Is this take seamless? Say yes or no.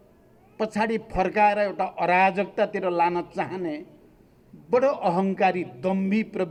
yes